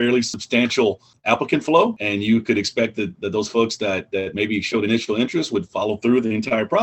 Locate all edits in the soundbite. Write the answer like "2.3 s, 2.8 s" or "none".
0.9 s, 2.0 s